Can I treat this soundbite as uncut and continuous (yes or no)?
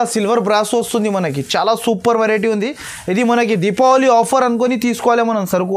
yes